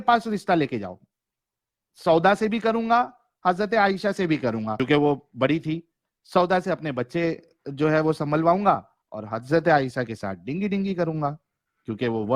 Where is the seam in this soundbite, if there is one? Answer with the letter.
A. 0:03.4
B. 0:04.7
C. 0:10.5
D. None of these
B